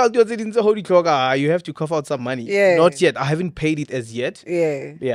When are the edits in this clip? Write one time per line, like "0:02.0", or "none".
none

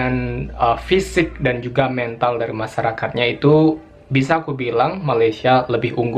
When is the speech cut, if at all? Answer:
none

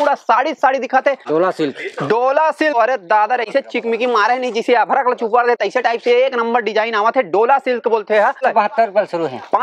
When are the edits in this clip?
none

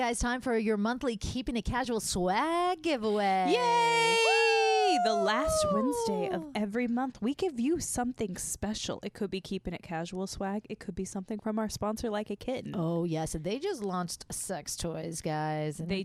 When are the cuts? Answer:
none

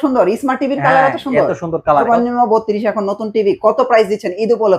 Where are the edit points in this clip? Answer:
0:02.1

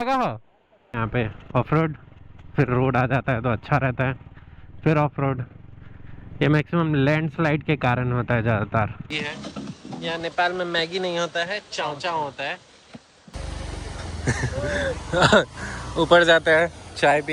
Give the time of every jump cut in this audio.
0:00.9
0:09.1
0:13.3

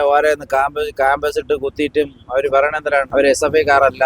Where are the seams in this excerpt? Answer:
0:03.1

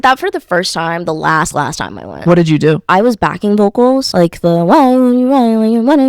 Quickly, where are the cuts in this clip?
0:02.1
0:02.9
0:04.1

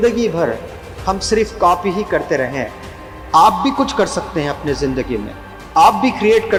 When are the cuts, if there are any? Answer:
none

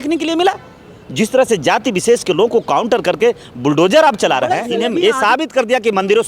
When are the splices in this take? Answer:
0:04.7

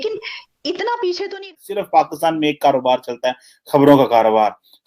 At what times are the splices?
0:01.6

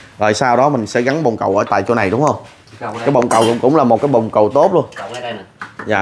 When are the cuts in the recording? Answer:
none

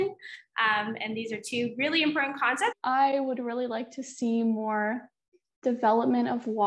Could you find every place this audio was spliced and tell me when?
0:02.8

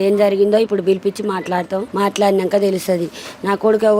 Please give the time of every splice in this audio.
0:01.9

